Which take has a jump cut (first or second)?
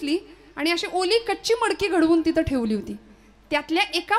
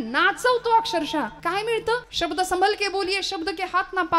second